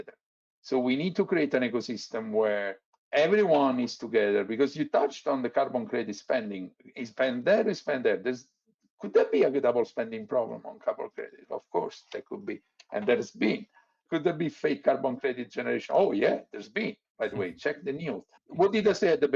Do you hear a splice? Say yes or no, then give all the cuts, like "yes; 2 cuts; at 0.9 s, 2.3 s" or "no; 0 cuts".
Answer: no; 0 cuts